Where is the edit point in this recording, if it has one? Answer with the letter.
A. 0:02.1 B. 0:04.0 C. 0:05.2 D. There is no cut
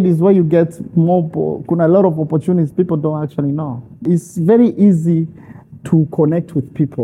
B